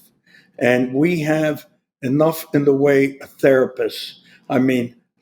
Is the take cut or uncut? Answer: uncut